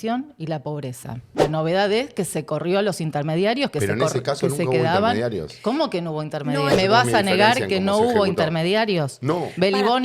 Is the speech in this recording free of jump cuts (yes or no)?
no